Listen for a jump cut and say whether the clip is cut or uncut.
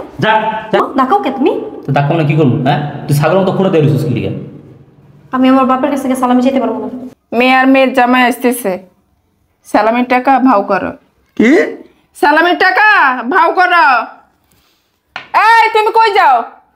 cut